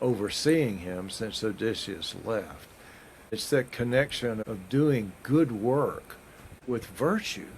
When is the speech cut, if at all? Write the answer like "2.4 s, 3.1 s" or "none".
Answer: 3.4 s, 4.5 s, 6.5 s